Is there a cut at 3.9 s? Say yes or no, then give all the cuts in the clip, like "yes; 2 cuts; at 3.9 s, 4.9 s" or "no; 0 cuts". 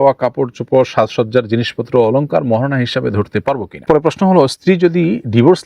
yes; 1 cut; at 3.9 s